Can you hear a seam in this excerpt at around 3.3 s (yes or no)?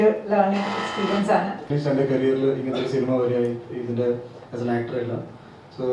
no